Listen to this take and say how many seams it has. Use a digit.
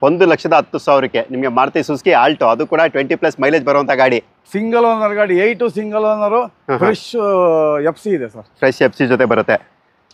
0